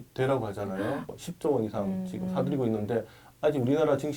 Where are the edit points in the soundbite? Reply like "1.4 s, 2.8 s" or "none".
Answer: 1.1 s